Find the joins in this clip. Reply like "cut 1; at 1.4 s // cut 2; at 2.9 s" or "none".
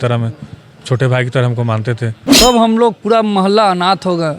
cut 1; at 2.2 s